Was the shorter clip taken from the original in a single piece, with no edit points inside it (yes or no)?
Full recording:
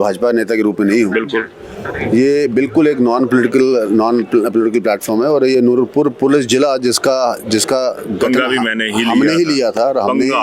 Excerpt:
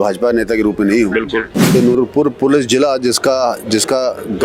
no